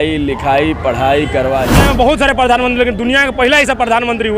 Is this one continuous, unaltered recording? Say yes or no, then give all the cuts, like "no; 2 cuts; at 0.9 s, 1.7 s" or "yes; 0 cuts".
no; 1 cut; at 1.7 s